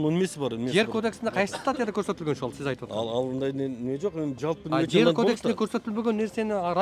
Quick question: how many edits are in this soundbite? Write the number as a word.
zero